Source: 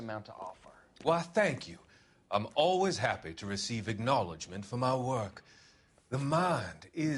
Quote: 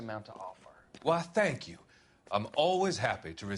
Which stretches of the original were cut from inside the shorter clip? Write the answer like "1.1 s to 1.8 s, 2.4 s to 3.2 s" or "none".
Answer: none